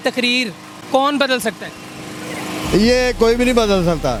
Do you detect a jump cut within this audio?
no; 0 cuts

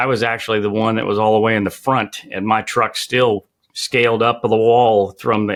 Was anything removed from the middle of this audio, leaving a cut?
no; 0 cuts

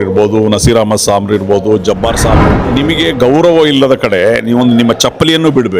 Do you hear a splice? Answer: yes; 1 cut; at 2.4 s

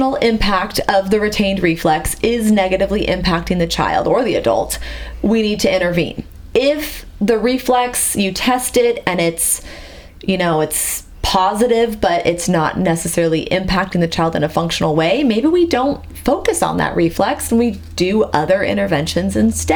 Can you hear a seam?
no; 0 cuts

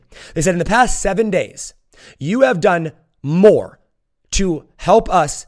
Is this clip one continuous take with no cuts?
yes; 0 cuts

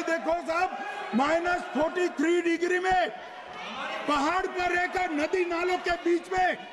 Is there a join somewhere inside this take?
no; 0 cuts

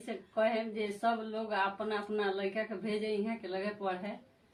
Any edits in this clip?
no; 0 cuts

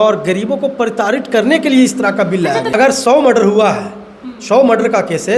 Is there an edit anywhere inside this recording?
yes; 1 cut; at 2.7 s

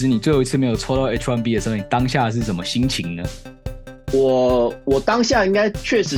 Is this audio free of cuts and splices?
yes; 0 cuts

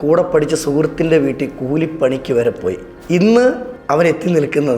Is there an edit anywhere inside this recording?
yes; 2 cuts; at 2.9 s, 3.7 s

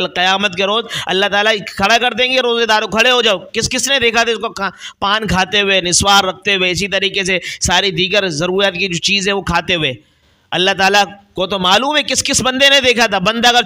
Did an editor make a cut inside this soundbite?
no; 0 cuts

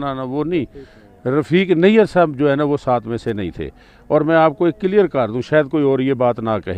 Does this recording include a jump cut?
no; 0 cuts

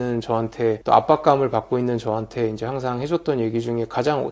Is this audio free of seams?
yes; 0 cuts

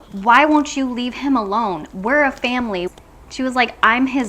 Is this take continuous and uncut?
no; 1 cut; at 2.9 s

